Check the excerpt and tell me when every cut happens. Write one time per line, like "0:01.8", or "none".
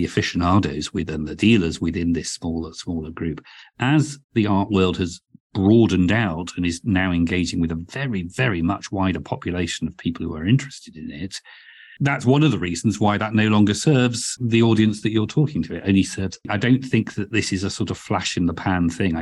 0:11.9
0:14.4
0:16.5